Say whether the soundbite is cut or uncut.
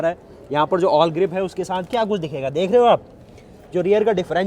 uncut